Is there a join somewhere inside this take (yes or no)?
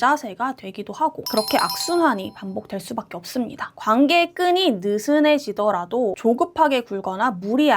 yes